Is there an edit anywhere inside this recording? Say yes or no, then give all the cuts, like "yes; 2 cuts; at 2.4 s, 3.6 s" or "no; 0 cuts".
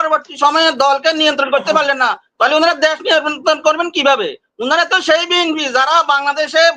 no; 0 cuts